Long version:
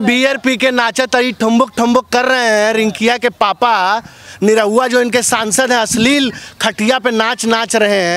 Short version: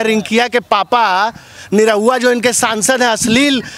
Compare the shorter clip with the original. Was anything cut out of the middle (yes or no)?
no